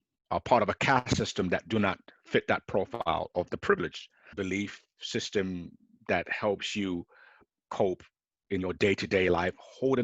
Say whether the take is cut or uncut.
cut